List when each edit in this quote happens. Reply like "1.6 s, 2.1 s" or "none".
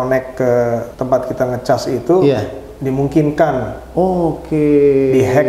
0.9 s

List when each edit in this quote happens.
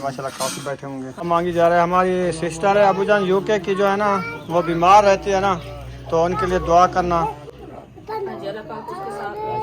1.3 s

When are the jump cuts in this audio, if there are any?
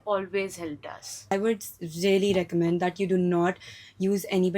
1.3 s

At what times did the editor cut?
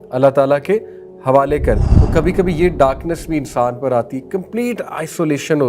1.9 s

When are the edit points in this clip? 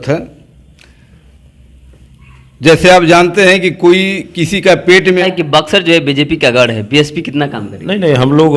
5.2 s

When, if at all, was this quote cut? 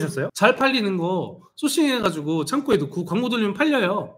none

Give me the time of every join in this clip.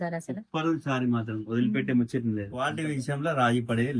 2.7 s

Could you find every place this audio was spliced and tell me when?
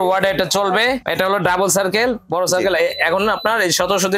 1.1 s

